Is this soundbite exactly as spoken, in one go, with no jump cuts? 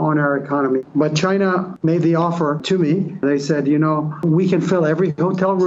no; 4 cuts; at 0.8 s, 1.7 s, 3.1 s, 4.2 s

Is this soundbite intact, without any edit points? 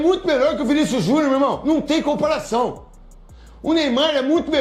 yes; 0 cuts

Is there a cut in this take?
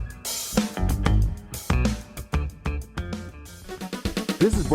yes; 1 cut; at 3.6 s

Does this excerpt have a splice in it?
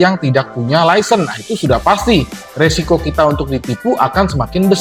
no; 0 cuts

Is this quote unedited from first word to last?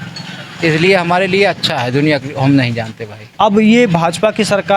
no; 1 cut; at 3.2 s

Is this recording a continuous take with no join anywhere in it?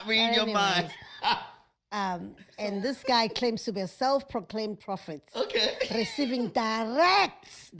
no; 1 cut; at 2.5 s

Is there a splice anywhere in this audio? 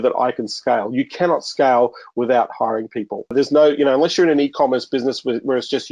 yes; 1 cut; at 3.3 s

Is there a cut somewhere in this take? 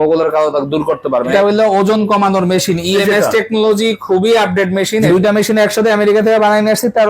yes; 2 cuts; at 1.3 s, 5.0 s

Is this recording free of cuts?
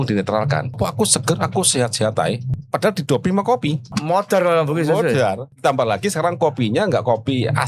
no; 4 cuts; at 0.7 s, 2.5 s, 3.8 s, 5.5 s

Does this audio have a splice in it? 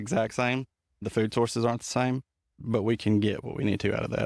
yes; 2 cuts; at 1.0 s, 2.5 s

